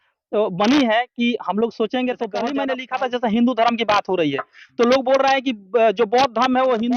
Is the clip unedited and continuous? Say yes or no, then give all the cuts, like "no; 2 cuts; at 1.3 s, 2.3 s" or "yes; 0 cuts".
no; 1 cut; at 2.5 s